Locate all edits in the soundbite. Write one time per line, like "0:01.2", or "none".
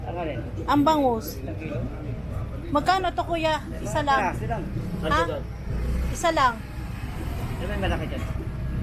none